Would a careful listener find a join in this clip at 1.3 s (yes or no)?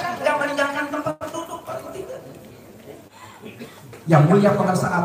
no